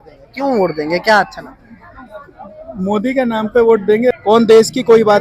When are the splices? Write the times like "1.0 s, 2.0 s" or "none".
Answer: 4.1 s